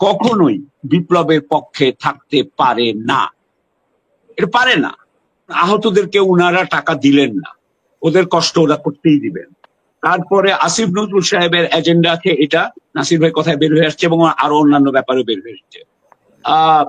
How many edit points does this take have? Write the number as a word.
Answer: one